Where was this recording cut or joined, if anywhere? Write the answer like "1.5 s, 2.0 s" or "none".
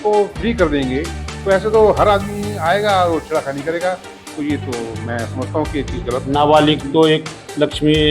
6.3 s